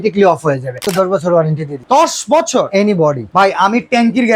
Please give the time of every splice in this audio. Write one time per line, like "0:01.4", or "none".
0:00.8
0:01.7
0:03.2